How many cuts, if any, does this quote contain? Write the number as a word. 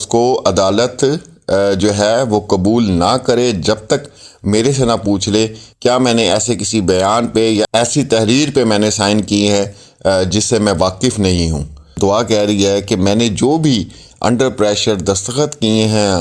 one